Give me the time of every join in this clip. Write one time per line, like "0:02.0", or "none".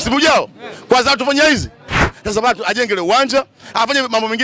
0:02.0